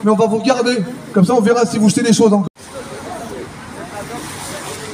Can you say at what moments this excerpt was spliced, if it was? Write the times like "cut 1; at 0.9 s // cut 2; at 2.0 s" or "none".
cut 1; at 2.6 s

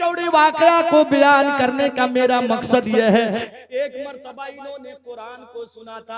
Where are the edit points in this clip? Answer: cut 1; at 3.5 s

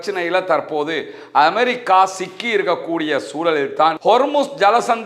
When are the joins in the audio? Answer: cut 1; at 4.0 s

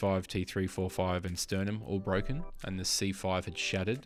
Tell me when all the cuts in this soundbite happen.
none

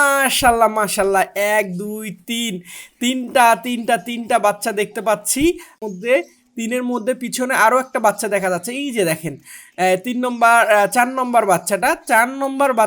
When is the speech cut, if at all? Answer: cut 1; at 5.7 s

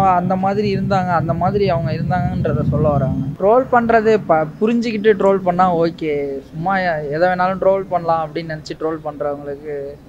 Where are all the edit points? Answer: cut 1; at 3.3 s

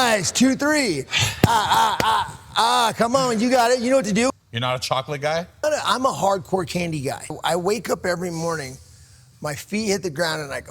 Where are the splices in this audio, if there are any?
cut 1; at 4.3 s // cut 2; at 5.6 s // cut 3; at 7.3 s

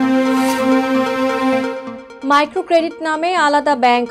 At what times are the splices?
none

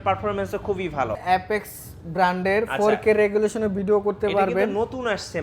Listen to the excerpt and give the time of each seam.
cut 1; at 1.2 s

